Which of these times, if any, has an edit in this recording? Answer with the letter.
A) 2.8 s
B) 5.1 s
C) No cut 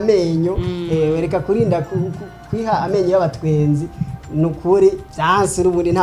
B